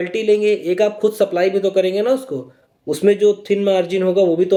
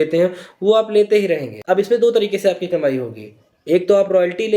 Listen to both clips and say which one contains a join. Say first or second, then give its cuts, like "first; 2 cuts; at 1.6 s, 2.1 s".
second; 1 cut; at 1.5 s